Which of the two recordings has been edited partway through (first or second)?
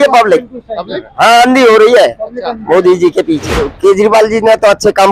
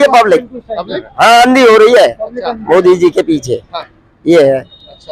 first